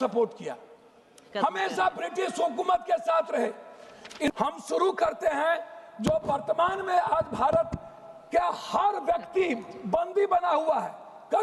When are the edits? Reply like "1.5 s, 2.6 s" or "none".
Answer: 4.3 s

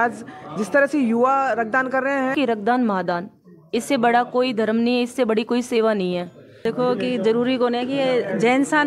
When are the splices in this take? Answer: 2.3 s, 6.6 s

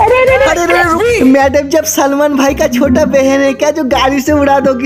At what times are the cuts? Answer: 0.9 s

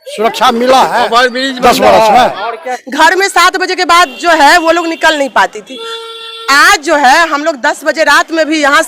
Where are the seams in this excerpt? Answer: 2.7 s

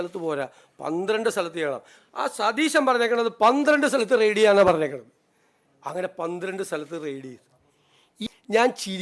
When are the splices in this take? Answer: 8.1 s

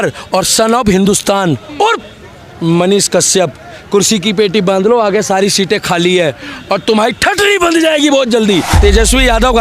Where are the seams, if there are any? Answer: 8.7 s

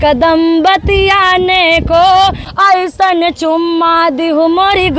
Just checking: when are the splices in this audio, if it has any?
2.4 s

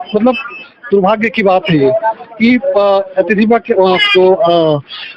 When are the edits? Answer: none

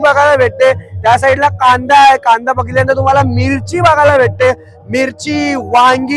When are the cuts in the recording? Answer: none

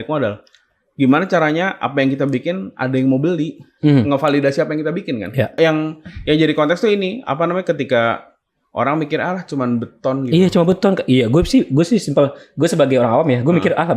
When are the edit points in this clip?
5.5 s

